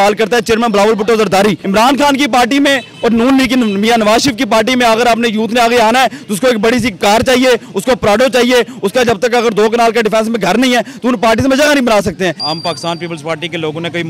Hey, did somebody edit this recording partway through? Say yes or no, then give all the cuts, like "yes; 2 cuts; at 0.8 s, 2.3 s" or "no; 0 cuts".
yes; 2 cuts; at 1.6 s, 12.5 s